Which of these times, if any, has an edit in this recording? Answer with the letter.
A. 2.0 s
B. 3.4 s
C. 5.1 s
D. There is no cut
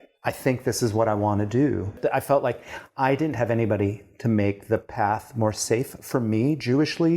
A